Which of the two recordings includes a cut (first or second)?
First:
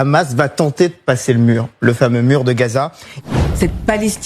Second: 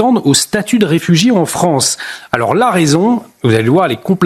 first